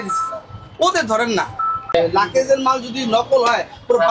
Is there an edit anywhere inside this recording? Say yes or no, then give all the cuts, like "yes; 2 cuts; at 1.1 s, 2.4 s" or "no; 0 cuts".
yes; 1 cut; at 1.9 s